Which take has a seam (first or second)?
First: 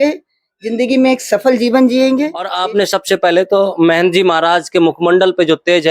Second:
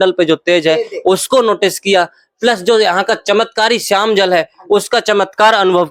first